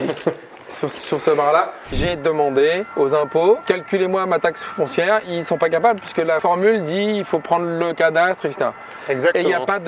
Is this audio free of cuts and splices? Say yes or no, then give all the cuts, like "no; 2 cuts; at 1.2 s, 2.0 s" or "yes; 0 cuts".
no; 5 cuts; at 2.0 s, 2.9 s, 3.6 s, 5.3 s, 6.4 s